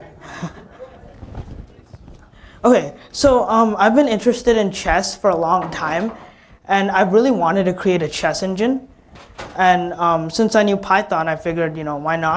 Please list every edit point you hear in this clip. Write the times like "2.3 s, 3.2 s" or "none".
9.7 s